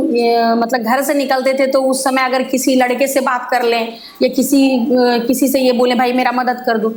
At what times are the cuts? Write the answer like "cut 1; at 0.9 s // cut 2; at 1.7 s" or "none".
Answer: none